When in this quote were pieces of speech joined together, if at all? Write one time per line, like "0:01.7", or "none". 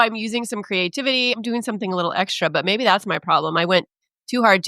0:01.4